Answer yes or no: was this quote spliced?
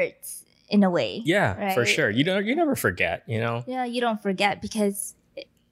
no